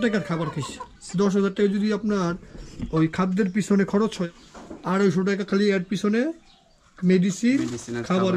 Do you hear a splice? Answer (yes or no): yes